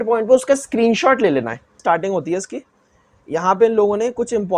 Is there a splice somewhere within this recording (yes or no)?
yes